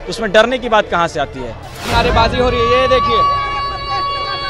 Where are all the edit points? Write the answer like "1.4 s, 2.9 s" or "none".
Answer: 1.8 s